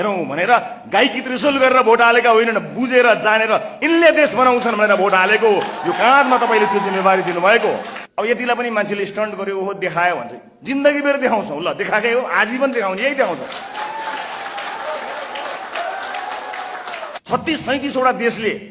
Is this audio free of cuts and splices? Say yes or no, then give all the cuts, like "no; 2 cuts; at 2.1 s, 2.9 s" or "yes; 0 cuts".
no; 2 cuts; at 8.0 s, 17.1 s